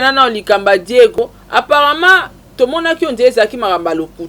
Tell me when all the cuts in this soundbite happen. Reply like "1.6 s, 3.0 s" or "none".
1.2 s